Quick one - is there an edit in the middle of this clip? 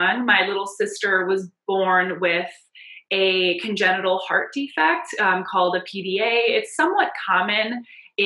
no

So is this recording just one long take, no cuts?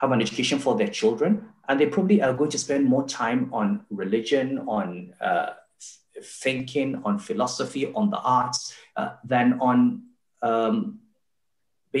yes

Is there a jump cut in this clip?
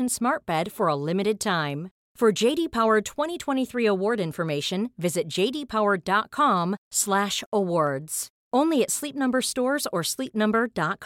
no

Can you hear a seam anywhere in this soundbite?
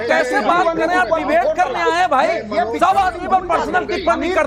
no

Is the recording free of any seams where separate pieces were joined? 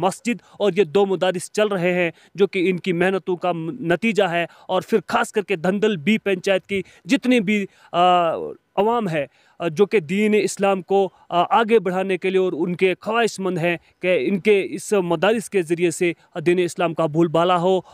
yes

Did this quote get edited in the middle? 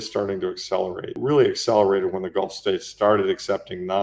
yes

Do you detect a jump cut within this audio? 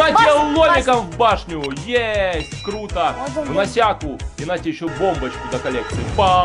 no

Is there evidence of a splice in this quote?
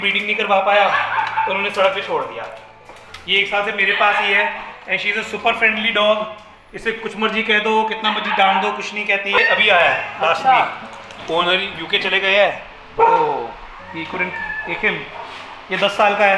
yes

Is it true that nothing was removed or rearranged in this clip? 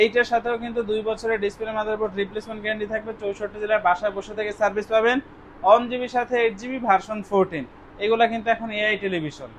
yes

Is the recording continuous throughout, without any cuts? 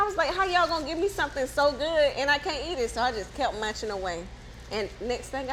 yes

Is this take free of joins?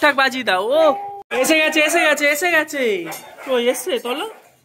no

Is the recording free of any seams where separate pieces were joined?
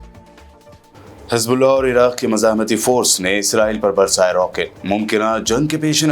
no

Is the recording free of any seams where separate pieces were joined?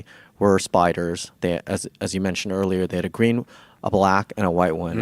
yes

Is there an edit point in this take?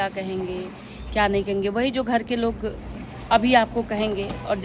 no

